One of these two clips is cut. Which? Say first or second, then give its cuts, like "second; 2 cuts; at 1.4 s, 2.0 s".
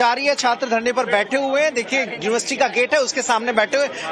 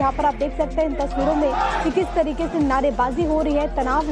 second; 1 cut; at 2.2 s